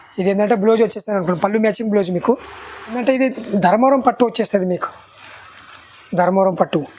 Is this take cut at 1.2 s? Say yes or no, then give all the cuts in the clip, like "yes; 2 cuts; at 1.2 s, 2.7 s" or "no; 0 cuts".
no; 1 cut; at 3.0 s